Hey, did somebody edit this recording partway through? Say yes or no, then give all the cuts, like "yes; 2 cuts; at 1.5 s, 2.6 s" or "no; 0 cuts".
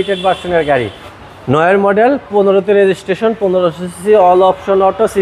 yes; 1 cut; at 1.0 s